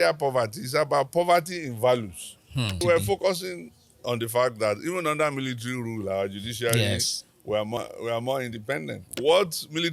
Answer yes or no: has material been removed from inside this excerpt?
yes